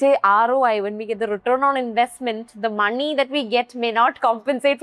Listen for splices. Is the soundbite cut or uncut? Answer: uncut